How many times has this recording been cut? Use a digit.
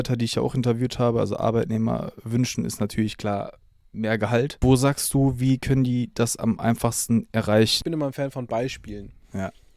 2